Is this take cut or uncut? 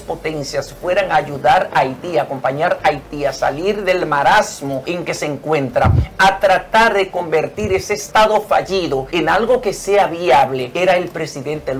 cut